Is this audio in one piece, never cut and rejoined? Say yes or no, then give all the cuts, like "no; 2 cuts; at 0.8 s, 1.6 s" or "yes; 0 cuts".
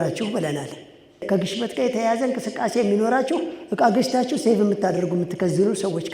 no; 1 cut; at 1.2 s